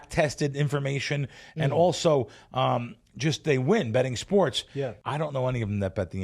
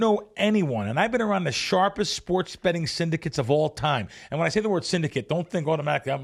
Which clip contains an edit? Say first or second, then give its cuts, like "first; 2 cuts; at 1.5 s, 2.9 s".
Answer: first; 1 cut; at 5.0 s